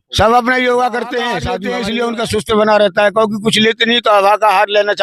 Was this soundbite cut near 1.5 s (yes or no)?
yes